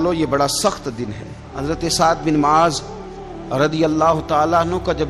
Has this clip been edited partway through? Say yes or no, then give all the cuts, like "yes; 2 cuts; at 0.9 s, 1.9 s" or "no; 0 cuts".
yes; 1 cut; at 1.5 s